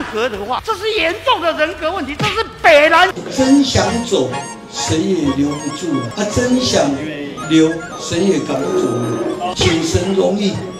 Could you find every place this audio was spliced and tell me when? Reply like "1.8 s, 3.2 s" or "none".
3.2 s, 6.1 s, 7.9 s